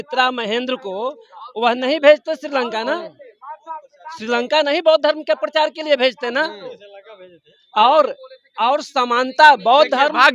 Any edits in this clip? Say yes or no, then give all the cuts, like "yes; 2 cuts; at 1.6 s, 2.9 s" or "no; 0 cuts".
no; 0 cuts